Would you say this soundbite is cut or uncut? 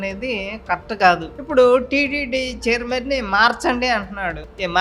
cut